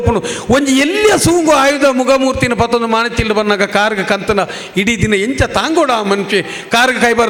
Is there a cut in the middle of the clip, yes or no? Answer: no